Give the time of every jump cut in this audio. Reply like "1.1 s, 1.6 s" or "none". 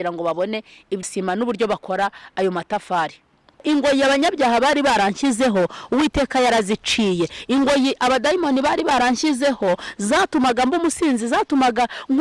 1.1 s, 3.6 s